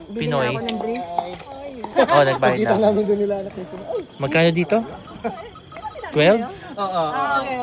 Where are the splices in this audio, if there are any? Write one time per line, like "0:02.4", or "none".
0:01.8